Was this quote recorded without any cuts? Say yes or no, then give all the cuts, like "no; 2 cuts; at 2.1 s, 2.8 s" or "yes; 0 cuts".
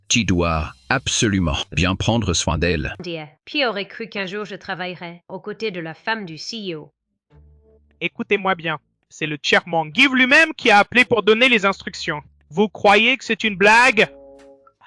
no; 1 cut; at 3.0 s